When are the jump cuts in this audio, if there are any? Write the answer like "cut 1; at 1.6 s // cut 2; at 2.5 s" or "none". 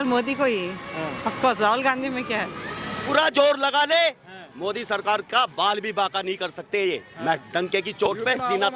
cut 1; at 3.0 s